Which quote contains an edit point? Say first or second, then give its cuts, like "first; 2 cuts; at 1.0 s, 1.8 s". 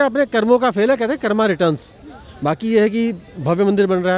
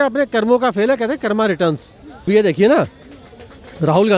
second; 1 cut; at 2.2 s